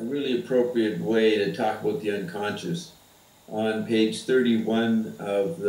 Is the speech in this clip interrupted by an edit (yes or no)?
no